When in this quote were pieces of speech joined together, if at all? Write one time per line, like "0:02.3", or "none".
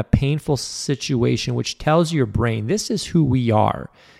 none